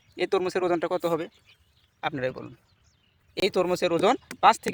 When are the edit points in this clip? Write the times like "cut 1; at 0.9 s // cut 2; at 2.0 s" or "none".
none